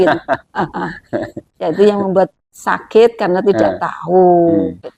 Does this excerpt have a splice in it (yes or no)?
no